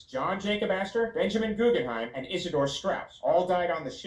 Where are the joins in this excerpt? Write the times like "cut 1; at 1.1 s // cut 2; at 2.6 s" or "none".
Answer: cut 1; at 3.1 s